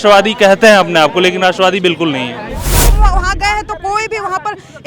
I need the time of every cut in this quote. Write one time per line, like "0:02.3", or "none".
0:03.0

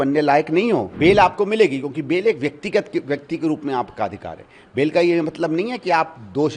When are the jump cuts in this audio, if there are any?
0:00.9

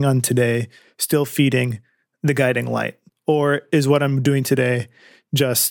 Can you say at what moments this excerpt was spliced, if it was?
0:03.1

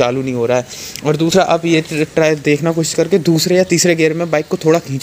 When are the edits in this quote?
none

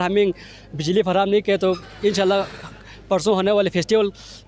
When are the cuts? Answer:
none

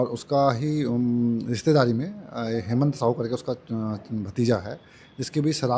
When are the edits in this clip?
none

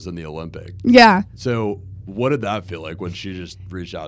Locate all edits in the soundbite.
none

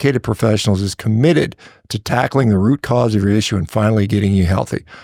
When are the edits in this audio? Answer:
none

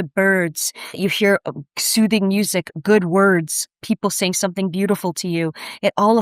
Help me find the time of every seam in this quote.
0:01.0

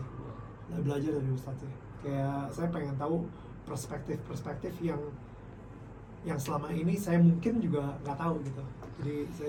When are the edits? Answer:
none

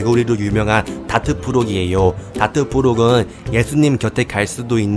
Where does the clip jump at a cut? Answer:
none

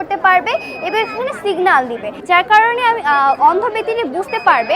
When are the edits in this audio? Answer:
0:02.1

